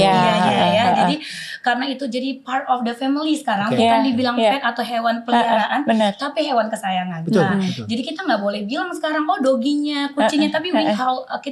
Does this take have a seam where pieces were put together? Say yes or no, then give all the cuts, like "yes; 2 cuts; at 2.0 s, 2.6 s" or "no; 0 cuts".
no; 0 cuts